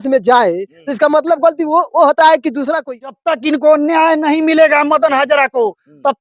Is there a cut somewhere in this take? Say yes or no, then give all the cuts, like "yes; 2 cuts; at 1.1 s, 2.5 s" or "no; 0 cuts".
yes; 1 cut; at 3.1 s